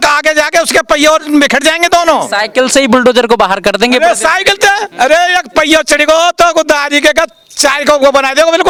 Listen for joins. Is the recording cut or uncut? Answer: uncut